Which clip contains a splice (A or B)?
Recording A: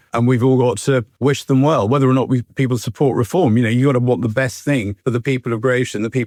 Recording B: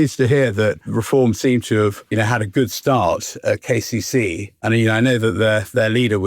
B